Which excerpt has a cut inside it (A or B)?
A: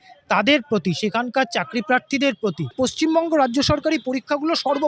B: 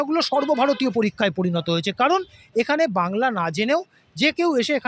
A